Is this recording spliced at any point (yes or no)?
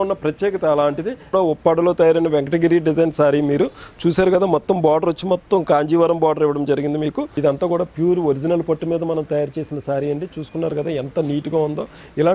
yes